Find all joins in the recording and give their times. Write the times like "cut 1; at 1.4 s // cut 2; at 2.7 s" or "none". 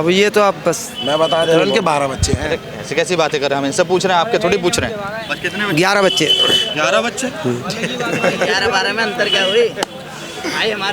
none